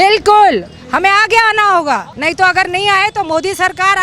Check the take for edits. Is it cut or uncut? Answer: cut